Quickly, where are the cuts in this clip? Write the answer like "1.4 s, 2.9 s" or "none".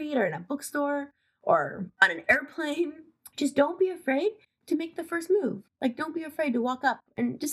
3.0 s